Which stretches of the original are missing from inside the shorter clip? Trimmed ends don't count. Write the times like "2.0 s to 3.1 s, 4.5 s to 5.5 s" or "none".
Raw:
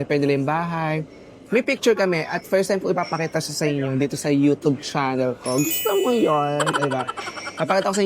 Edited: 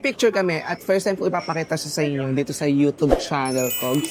none